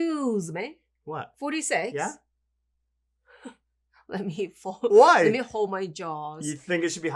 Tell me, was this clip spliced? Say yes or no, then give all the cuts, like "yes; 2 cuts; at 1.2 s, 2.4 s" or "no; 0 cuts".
yes; 1 cut; at 1.3 s